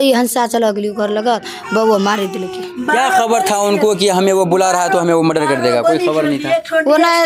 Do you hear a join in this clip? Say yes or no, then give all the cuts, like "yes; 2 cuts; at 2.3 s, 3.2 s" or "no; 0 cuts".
no; 0 cuts